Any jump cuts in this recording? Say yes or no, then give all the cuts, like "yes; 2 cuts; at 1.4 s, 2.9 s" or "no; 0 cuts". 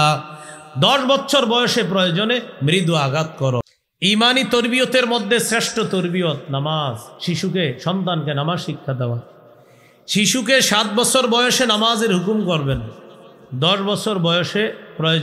yes; 1 cut; at 3.7 s